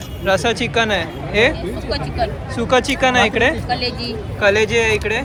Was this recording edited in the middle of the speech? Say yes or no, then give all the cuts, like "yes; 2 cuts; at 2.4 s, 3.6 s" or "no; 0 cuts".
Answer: no; 0 cuts